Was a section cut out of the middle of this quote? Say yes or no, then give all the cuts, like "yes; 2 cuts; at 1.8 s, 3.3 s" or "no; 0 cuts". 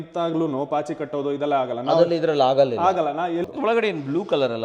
yes; 1 cut; at 3.5 s